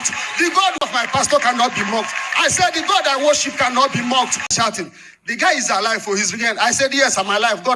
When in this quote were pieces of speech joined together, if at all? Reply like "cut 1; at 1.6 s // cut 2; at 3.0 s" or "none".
cut 1; at 0.9 s // cut 2; at 4.5 s